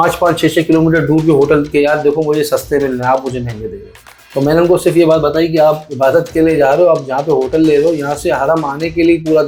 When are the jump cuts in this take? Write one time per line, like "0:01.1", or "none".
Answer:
none

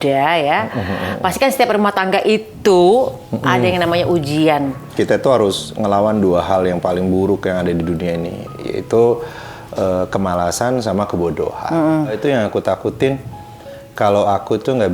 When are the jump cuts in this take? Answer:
0:04.8
0:12.2

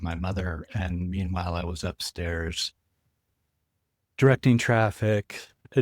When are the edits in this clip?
none

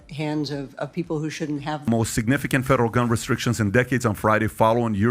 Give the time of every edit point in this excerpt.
0:01.8

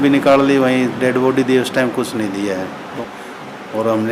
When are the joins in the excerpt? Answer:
0:02.9

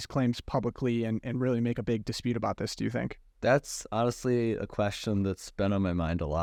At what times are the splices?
none

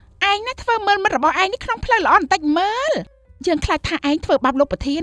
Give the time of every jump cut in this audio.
0:03.2

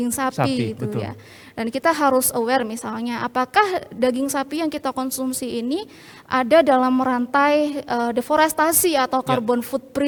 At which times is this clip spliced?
none

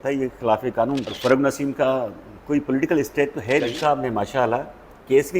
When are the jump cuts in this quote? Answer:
0:01.1
0:03.8

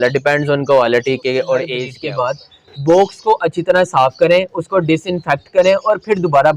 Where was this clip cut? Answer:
0:01.9

